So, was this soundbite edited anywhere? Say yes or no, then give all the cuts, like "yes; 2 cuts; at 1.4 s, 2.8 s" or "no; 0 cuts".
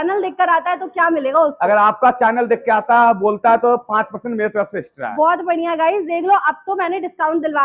no; 0 cuts